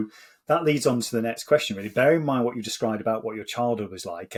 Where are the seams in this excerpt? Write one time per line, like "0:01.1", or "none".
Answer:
none